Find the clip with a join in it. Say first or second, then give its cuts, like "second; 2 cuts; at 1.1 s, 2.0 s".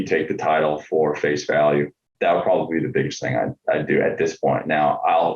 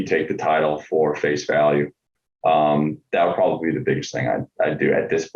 first; 1 cut; at 2.1 s